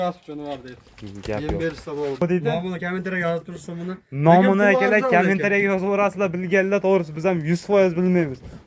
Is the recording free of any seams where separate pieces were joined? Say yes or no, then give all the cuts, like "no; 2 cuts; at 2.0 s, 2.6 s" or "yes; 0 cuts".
no; 1 cut; at 2.2 s